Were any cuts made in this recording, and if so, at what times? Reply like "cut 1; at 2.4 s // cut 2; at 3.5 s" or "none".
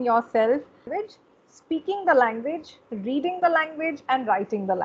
cut 1; at 0.9 s

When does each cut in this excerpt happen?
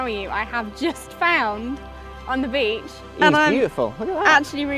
cut 1; at 3.0 s

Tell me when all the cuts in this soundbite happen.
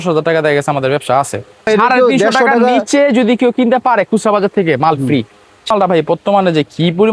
cut 1; at 1.7 s // cut 2; at 5.5 s

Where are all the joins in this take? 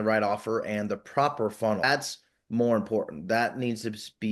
cut 1; at 1.8 s

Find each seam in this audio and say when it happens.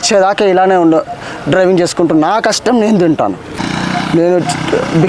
cut 1; at 3.6 s

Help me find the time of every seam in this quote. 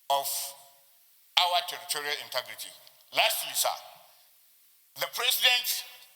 none

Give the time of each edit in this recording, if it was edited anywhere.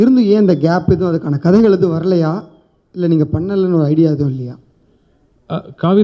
none

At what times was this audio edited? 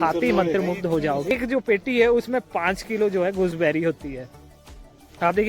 cut 1; at 1.3 s

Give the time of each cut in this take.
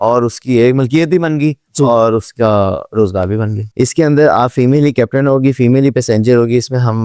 cut 1; at 3.7 s

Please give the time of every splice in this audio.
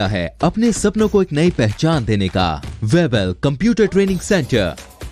cut 1; at 2.7 s

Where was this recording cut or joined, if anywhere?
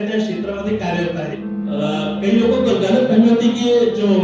cut 1; at 1.4 s

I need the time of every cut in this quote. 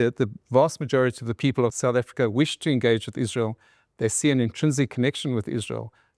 cut 1; at 1.7 s

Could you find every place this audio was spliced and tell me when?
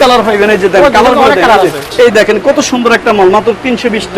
cut 1; at 1.9 s

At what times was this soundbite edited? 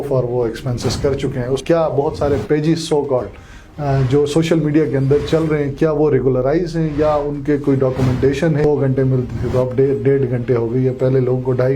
cut 1; at 1.6 s // cut 2; at 8.6 s

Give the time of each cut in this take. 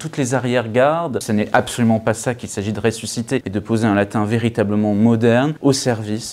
cut 1; at 1.2 s // cut 2; at 3.5 s // cut 3; at 5.6 s

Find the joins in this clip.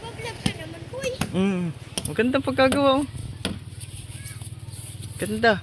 none

